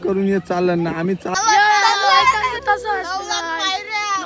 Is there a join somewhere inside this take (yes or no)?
yes